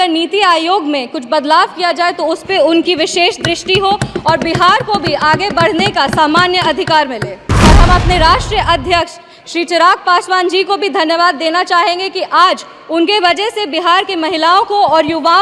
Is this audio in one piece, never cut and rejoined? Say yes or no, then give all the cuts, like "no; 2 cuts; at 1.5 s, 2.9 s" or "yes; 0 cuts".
no; 1 cut; at 7.5 s